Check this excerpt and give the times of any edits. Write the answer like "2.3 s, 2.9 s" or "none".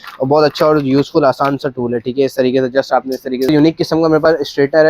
3.5 s